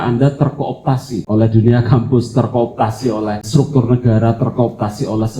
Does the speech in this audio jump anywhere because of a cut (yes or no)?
yes